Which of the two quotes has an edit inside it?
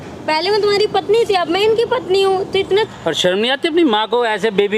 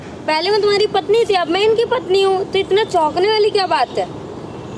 first; 1 cut; at 2.9 s

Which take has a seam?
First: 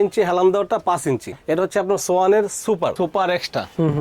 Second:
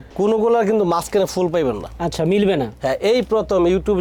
first; 1 cut; at 2.9 s

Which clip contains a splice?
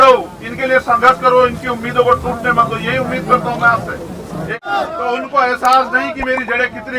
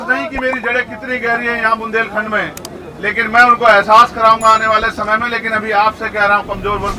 first; 1 cut; at 4.7 s

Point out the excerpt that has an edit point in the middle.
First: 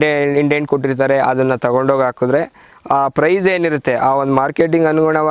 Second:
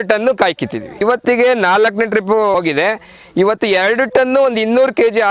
second; 2 cuts; at 1.0 s, 2.5 s

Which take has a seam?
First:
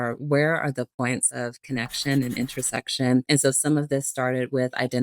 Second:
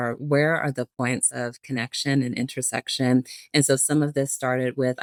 first; 1 cut; at 3.2 s

